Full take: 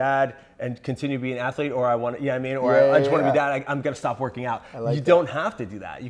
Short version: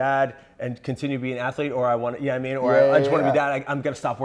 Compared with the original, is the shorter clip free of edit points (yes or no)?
yes